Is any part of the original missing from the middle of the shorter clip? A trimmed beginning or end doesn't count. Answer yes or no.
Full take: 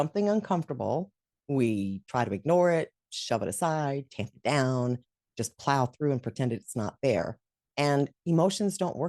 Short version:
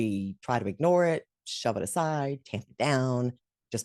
no